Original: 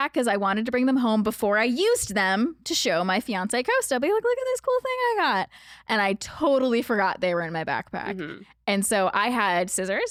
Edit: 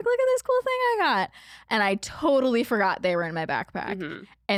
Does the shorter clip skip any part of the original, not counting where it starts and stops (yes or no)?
no